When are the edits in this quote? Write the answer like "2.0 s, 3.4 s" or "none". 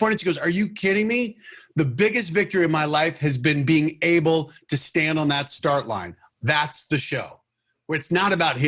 6.2 s